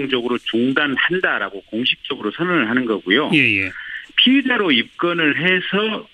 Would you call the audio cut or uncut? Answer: cut